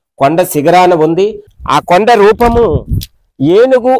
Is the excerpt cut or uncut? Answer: cut